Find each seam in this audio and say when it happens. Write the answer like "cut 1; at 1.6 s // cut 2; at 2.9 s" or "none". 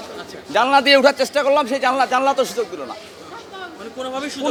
none

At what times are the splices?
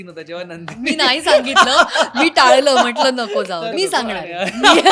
cut 1; at 3.7 s

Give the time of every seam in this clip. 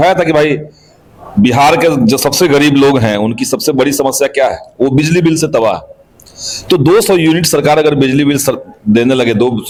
none

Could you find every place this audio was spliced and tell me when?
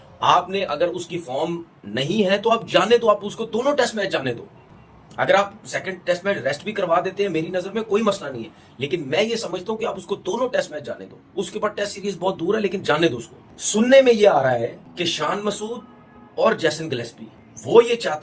none

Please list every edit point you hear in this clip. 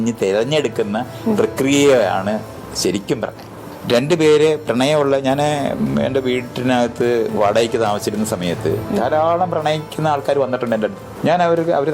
cut 1; at 3.7 s // cut 2; at 11.1 s

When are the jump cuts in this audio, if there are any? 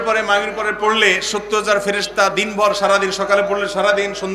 none

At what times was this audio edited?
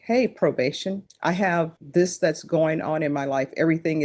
cut 1; at 1.1 s // cut 2; at 1.8 s

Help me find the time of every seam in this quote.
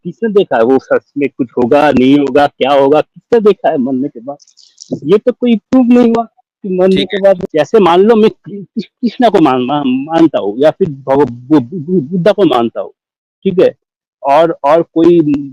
cut 1; at 7.4 s

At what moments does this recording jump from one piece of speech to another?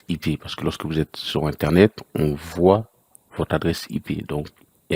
none

